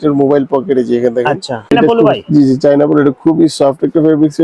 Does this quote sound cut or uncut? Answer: cut